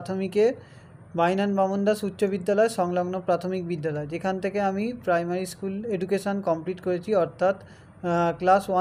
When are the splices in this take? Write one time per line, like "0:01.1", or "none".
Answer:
none

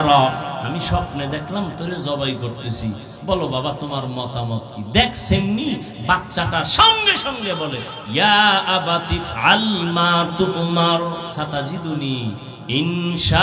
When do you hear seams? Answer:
0:11.3

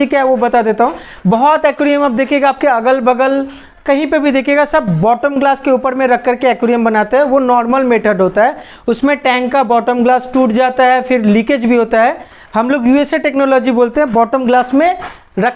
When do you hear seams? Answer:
none

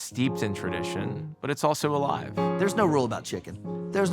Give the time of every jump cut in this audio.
0:02.4

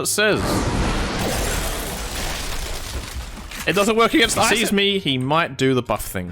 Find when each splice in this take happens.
0:04.5

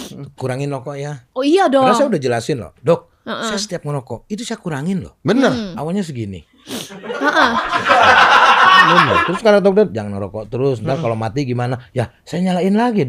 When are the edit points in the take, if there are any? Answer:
0:01.2
0:09.3

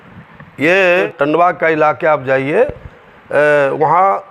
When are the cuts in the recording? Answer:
0:01.0

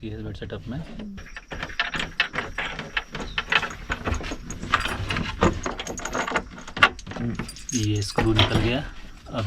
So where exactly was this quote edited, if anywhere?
0:01.2

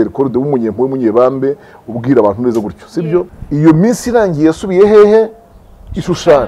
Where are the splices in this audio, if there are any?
0:03.4

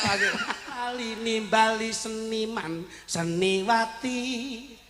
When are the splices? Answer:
0:01.1

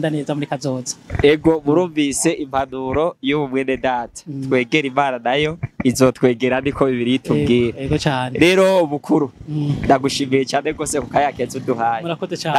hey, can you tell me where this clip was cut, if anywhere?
none

